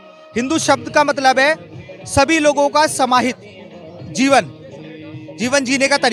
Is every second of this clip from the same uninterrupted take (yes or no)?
yes